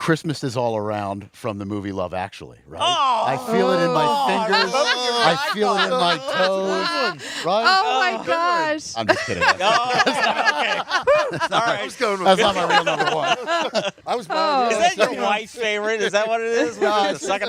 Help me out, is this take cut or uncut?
uncut